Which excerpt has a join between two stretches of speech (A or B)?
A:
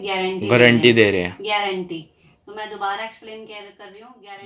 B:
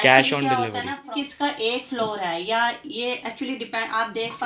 B